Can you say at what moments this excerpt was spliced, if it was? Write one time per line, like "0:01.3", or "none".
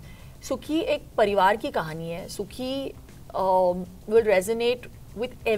none